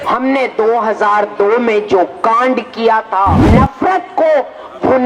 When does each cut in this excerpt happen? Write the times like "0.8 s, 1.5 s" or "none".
3.4 s